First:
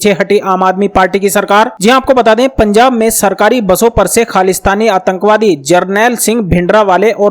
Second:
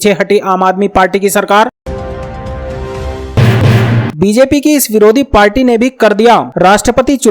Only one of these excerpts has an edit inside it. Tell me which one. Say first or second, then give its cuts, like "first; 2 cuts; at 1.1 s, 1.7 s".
second; 2 cuts; at 1.8 s, 3.3 s